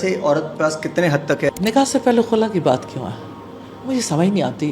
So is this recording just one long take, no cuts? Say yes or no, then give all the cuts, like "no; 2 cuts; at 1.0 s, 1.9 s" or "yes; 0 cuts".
no; 1 cut; at 1.5 s